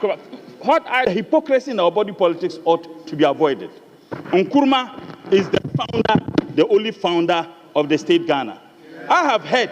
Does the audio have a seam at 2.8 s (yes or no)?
no